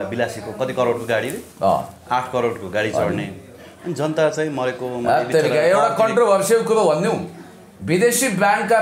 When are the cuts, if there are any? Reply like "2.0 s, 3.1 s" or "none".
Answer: none